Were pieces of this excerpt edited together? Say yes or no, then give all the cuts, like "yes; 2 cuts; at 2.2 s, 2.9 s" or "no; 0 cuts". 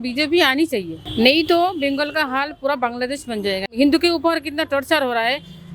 yes; 2 cuts; at 1.0 s, 3.7 s